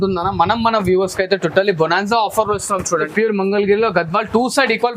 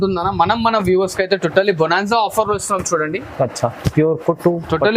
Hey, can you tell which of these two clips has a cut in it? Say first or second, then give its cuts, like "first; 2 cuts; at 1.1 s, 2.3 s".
first; 1 cut; at 3.1 s